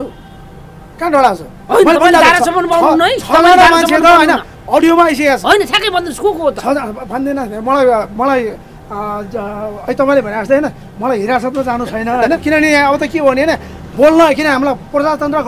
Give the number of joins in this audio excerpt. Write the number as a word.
one